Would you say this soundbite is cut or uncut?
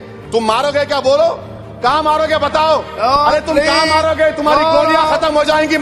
uncut